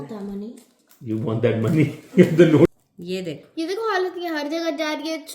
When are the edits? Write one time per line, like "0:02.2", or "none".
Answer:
0:02.7